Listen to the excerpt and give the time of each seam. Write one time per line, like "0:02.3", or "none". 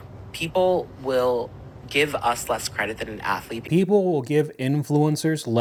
none